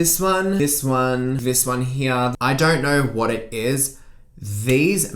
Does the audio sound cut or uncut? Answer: cut